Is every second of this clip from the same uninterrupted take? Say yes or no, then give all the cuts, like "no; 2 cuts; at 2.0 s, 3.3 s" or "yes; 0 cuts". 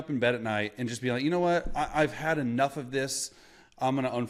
yes; 0 cuts